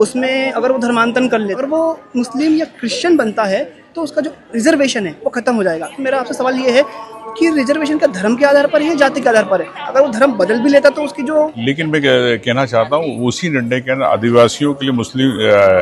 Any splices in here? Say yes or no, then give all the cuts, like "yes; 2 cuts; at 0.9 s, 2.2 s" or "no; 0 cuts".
yes; 2 cuts; at 1.6 s, 11.6 s